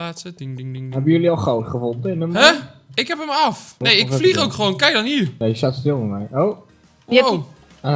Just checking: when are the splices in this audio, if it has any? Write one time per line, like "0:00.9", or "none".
0:03.7
0:05.3